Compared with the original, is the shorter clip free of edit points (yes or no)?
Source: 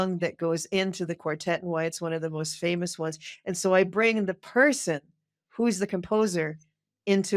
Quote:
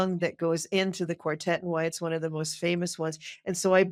yes